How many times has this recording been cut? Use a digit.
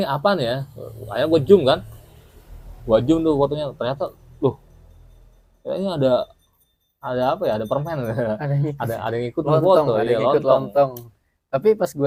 0